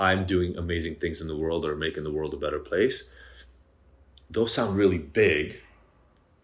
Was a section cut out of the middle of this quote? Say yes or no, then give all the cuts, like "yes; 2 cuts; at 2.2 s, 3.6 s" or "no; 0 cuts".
no; 0 cuts